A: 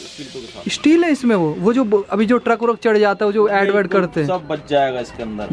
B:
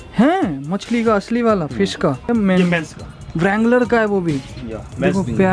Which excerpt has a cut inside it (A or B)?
B